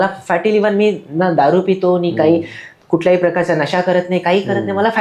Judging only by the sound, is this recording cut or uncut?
uncut